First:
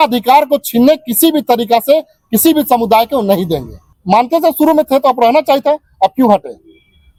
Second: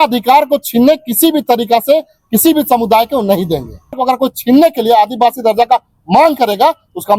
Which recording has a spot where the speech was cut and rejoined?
second; 1 cut; at 4.0 s

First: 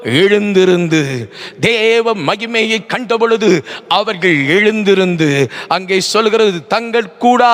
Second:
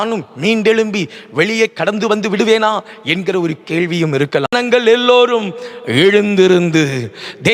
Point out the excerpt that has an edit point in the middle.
second; 1 cut; at 4.5 s

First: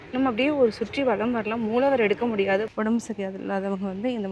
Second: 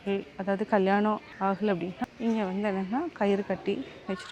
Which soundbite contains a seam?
first; 1 cut; at 2.7 s

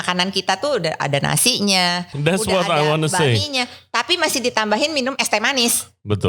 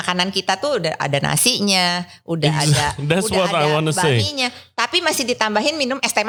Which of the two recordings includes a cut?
first; 1 cut; at 2.1 s

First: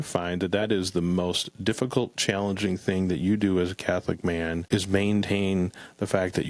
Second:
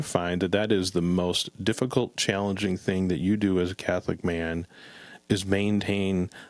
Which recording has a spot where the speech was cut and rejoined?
first; 1 cut; at 4.6 s

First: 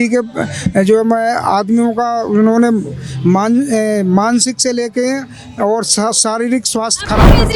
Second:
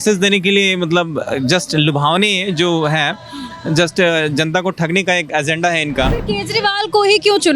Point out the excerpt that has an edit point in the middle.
second; 1 cut; at 6.2 s

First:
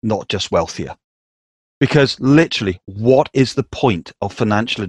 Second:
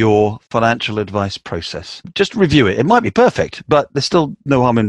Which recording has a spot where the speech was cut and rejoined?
second; 1 cut; at 2.1 s

